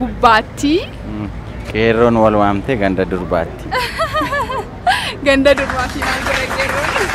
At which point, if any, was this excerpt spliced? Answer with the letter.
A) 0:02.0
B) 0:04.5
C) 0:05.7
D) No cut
D